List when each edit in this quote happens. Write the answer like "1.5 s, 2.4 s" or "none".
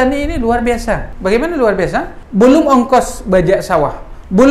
1.1 s, 2.2 s